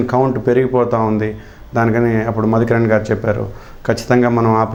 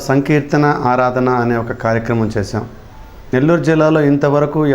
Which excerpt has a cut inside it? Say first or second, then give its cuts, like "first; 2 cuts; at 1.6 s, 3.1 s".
second; 1 cut; at 3.2 s